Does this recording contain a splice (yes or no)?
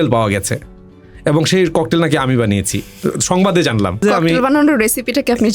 yes